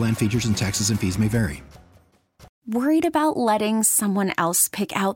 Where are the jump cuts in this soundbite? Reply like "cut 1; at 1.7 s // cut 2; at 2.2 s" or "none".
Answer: cut 1; at 2.5 s